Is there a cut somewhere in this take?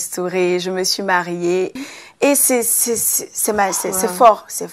yes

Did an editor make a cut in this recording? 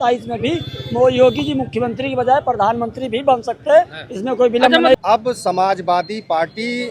yes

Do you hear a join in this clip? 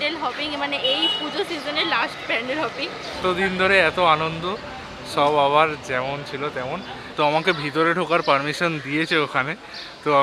yes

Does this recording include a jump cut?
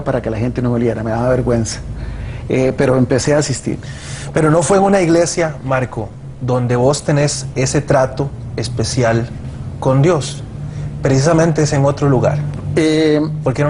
no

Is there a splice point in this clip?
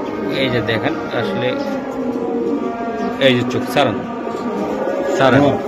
no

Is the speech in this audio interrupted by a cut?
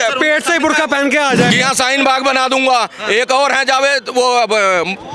yes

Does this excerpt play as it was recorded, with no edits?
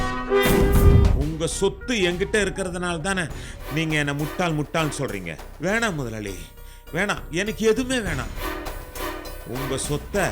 no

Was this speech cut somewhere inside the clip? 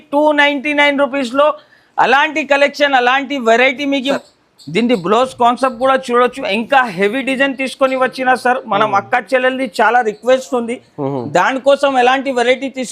yes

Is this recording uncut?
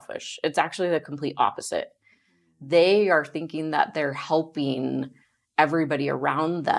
yes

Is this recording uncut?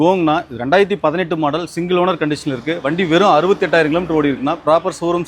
yes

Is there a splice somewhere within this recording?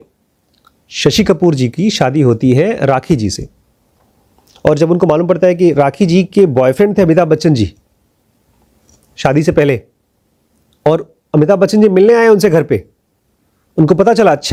no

